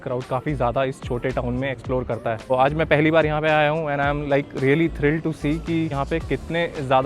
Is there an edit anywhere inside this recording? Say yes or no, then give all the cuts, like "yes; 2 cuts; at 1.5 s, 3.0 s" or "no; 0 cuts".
yes; 2 cuts; at 2.5 s, 5.9 s